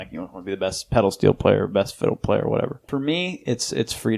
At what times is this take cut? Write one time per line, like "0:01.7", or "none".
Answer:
0:02.9